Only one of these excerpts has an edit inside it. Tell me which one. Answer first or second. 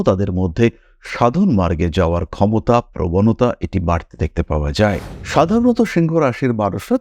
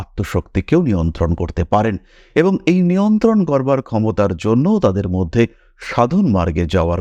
first